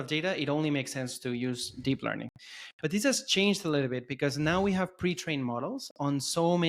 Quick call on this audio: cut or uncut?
uncut